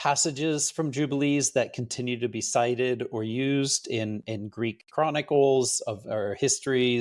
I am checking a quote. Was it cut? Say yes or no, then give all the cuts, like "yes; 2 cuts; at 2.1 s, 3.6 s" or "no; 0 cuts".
no; 0 cuts